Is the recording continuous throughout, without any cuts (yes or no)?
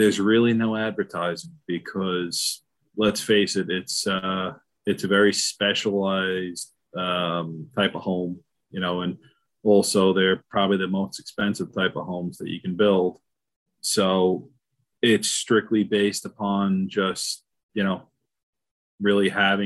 yes